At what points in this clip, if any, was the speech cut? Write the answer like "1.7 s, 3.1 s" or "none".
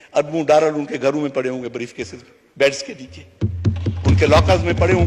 none